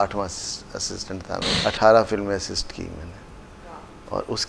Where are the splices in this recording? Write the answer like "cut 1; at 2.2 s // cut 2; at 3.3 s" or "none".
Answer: cut 1; at 1.5 s